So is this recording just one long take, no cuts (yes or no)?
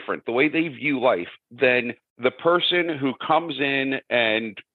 no